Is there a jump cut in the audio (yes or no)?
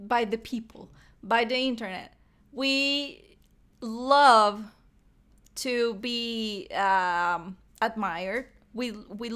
no